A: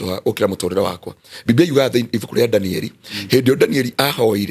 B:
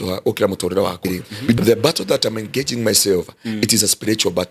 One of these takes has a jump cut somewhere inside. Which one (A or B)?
B